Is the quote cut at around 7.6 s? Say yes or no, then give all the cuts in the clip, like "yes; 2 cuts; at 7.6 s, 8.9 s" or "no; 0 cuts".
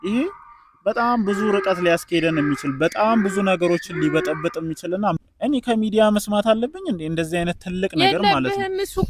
no; 1 cut; at 5.2 s